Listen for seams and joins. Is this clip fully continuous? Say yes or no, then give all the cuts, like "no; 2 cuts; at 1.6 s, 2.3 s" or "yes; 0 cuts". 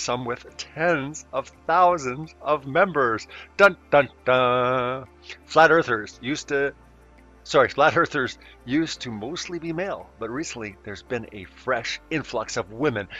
yes; 0 cuts